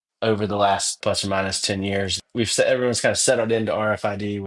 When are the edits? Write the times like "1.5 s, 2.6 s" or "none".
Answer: 1.0 s, 2.2 s